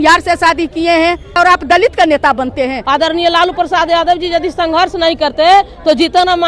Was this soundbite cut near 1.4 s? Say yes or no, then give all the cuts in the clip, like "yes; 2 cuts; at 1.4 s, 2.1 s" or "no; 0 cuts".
yes; 2 cuts; at 1.4 s, 2.8 s